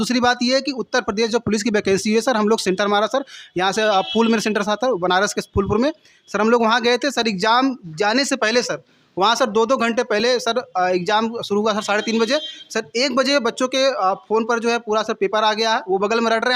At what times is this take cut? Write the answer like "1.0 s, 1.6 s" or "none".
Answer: none